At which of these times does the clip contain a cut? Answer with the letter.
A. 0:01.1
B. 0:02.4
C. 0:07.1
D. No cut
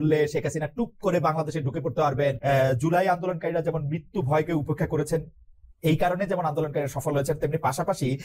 B